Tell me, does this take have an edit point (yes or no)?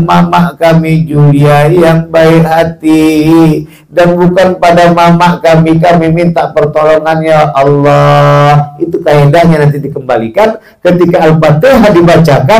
no